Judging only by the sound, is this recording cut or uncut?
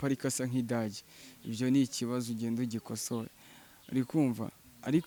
uncut